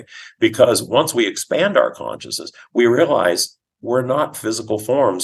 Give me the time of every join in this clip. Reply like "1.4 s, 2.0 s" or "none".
none